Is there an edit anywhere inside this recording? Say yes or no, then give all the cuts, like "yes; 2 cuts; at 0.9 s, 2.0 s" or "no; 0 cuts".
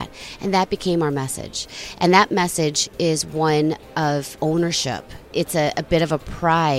yes; 2 cuts; at 4.3 s, 5.3 s